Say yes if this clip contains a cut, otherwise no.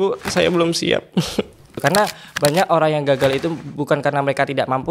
yes